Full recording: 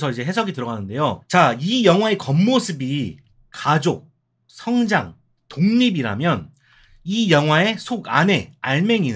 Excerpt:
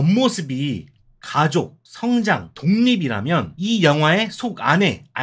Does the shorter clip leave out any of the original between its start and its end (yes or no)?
yes